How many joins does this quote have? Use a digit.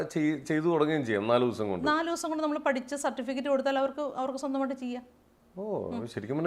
0